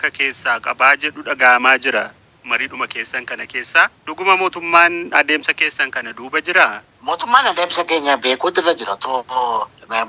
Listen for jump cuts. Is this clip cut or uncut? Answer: uncut